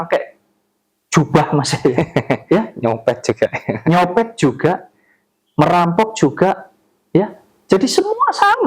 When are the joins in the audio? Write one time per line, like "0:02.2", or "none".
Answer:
0:06.7